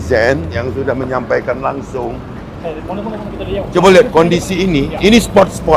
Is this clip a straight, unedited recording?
yes; 0 cuts

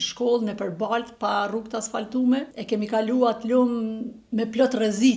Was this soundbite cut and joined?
yes; 1 cut; at 2.6 s

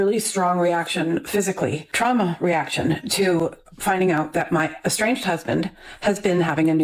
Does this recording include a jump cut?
no; 0 cuts

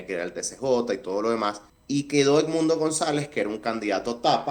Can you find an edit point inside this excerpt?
yes; 1 cut; at 1.7 s

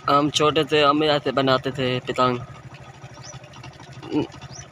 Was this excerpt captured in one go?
yes; 0 cuts

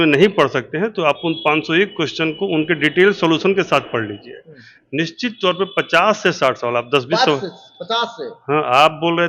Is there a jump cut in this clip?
no; 0 cuts

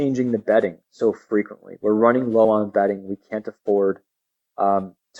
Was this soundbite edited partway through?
no; 0 cuts

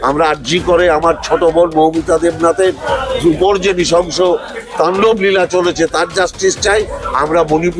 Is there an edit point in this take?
no; 0 cuts

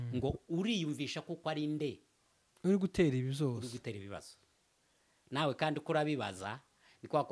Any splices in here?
no; 0 cuts

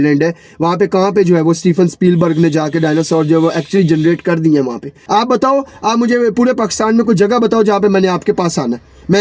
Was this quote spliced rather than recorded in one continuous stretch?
yes; 1 cut; at 5.0 s

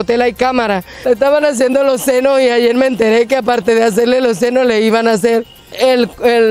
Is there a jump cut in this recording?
yes; 2 cuts; at 0.9 s, 5.6 s

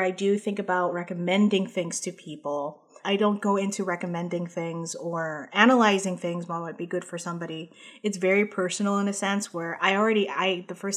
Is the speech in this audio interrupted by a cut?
no; 0 cuts

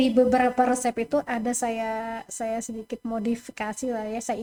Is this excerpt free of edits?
yes; 0 cuts

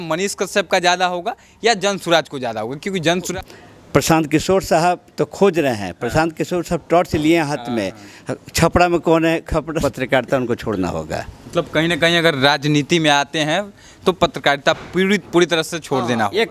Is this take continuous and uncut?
no; 2 cuts; at 3.3 s, 9.8 s

